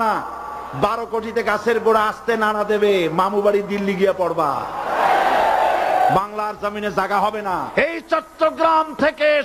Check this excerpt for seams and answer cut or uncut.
cut